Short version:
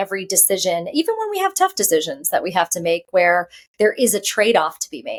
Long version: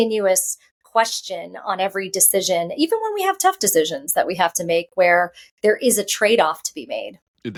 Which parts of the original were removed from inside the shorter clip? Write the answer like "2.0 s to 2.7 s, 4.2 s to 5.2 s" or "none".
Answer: none